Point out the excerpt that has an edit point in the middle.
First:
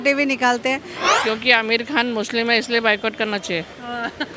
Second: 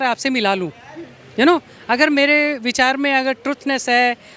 first; 1 cut; at 0.9 s

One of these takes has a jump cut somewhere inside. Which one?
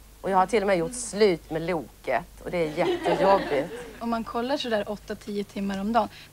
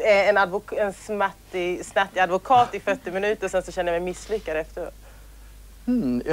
first; 1 cut; at 4.0 s

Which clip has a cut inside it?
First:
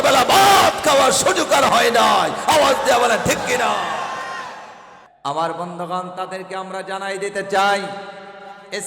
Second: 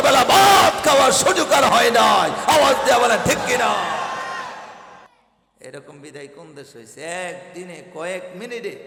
first; 1 cut; at 5.0 s

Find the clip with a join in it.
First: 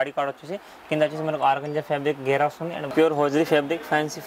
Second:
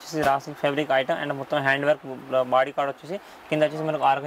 first; 1 cut; at 2.9 s

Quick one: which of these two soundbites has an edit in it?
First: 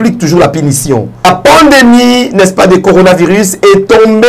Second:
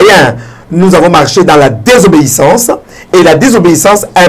first; 1 cut; at 1.2 s

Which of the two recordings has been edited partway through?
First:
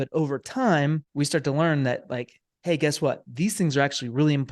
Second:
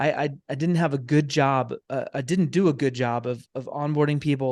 first; 1 cut; at 1.1 s

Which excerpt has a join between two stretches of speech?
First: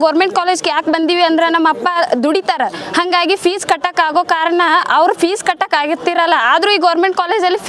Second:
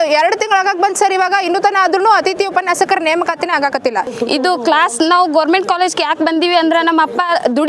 second; 1 cut; at 4.1 s

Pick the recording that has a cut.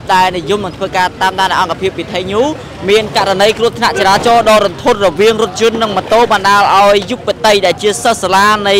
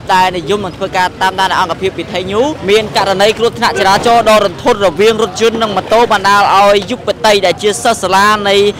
second; 1 cut; at 2.6 s

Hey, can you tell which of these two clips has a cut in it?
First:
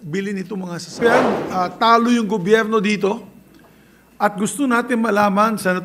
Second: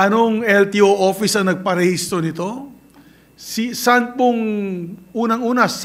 first; 1 cut; at 1.0 s

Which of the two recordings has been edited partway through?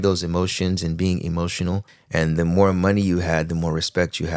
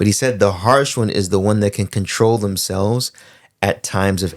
first; 1 cut; at 1.9 s

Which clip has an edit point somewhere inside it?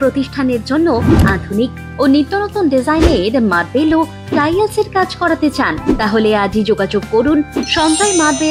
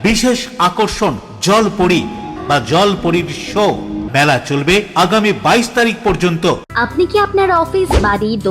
second; 3 cuts; at 2.3 s, 4.0 s, 6.7 s

